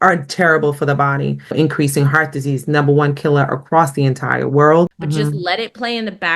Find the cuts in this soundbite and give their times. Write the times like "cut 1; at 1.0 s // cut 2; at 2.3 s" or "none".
cut 1; at 1.5 s // cut 2; at 5.0 s